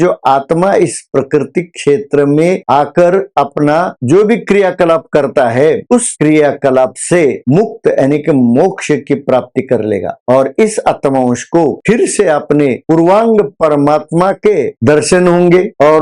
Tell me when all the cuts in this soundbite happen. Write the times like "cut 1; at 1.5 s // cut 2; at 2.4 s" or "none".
none